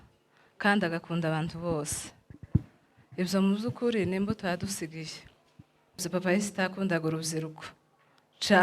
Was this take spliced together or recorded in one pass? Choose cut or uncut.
cut